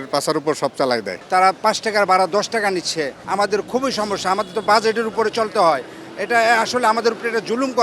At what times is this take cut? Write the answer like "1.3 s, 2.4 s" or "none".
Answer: 1.1 s, 3.2 s